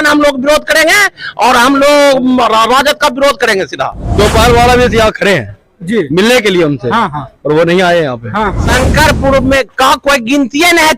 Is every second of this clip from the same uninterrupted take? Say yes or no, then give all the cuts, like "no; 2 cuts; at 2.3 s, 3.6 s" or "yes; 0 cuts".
no; 2 cuts; at 4.1 s, 8.6 s